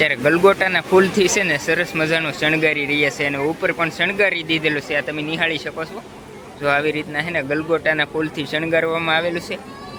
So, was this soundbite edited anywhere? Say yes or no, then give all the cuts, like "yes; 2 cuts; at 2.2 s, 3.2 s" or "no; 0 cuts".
no; 0 cuts